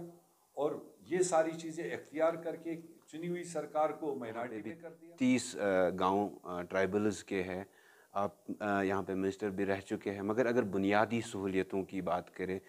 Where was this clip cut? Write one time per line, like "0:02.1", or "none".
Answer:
0:04.8